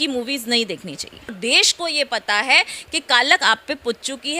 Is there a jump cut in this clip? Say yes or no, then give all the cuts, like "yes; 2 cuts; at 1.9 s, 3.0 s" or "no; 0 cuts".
yes; 1 cut; at 1.4 s